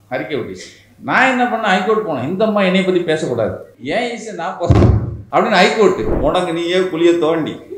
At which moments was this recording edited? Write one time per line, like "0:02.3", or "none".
0:03.7
0:05.1
0:06.1